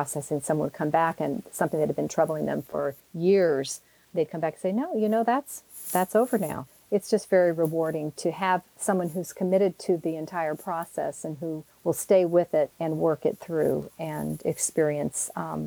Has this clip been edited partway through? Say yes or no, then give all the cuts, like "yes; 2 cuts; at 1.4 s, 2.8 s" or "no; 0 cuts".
yes; 3 cuts; at 6.7 s, 11.7 s, 12.8 s